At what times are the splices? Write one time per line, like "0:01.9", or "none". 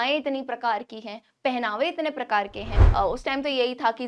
0:02.8